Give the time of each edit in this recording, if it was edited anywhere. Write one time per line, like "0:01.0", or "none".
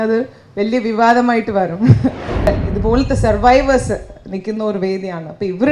0:02.5

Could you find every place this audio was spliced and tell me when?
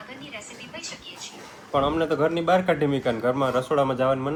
none

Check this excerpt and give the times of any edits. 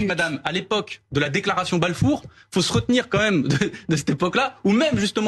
none

